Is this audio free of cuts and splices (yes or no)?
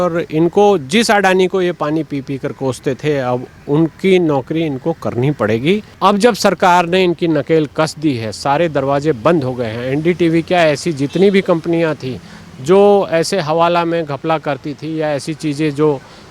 no